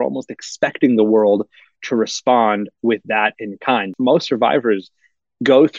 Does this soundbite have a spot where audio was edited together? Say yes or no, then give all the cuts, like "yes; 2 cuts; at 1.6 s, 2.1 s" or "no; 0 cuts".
yes; 1 cut; at 3.9 s